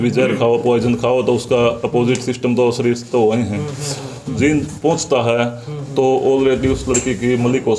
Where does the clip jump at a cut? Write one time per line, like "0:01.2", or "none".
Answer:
0:04.2